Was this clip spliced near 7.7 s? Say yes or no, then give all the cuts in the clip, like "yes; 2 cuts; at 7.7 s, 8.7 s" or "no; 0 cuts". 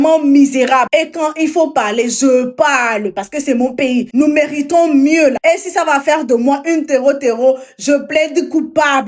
no; 3 cuts; at 0.9 s, 4.1 s, 5.4 s